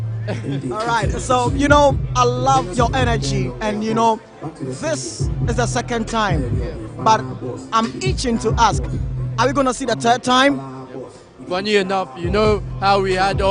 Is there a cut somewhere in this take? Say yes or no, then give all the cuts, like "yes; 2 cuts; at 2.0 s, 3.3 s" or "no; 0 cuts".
no; 0 cuts